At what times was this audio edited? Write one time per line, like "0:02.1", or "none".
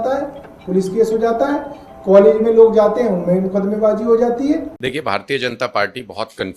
0:04.7

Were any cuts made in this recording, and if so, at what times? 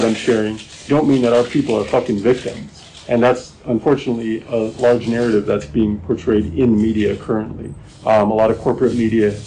none

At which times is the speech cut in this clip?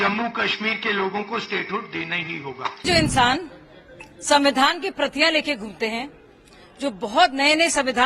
0:02.8

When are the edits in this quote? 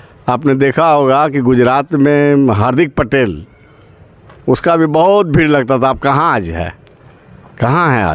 none

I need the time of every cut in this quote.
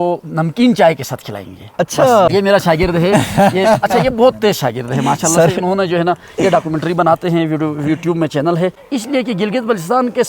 0:02.3
0:08.9

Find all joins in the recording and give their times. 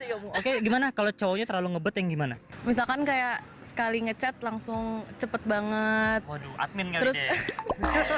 0:02.5

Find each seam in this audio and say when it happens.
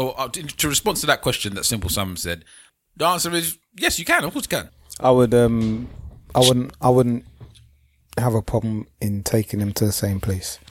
0:02.6
0:04.7

